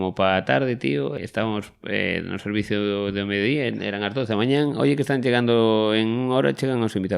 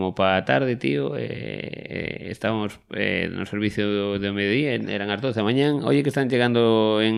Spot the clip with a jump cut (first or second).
first